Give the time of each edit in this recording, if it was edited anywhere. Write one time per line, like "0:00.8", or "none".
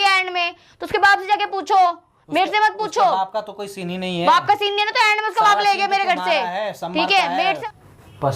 0:07.4